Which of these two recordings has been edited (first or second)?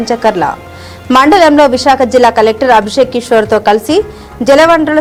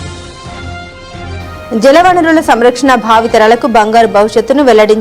second